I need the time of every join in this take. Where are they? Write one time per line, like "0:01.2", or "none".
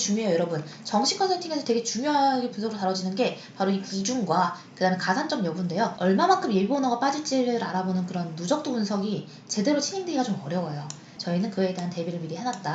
0:05.9
0:11.1